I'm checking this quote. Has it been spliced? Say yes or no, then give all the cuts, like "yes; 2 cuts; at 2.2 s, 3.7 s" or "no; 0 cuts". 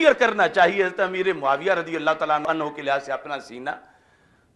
no; 0 cuts